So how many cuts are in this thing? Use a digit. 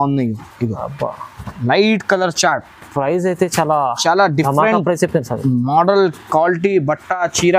0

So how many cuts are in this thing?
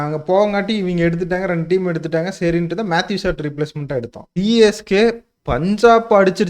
1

